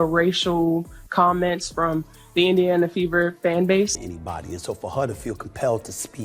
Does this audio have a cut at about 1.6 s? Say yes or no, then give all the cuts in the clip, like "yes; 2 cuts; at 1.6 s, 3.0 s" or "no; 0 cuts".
no; 1 cut; at 4.0 s